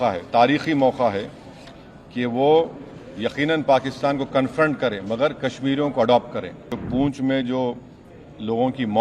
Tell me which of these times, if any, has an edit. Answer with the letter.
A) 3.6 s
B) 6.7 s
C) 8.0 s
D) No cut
B